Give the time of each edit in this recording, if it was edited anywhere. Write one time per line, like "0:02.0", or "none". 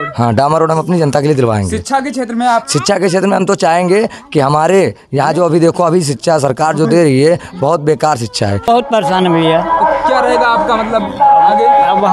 0:08.7